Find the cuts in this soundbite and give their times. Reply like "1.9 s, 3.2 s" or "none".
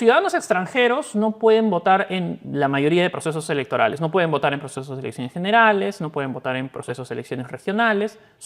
none